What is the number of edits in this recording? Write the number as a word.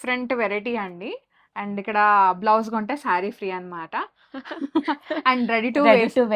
zero